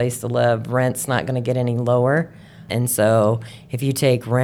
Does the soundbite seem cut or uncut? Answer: cut